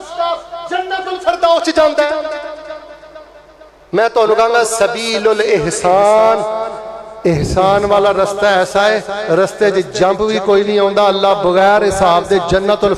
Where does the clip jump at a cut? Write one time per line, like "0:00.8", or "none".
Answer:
none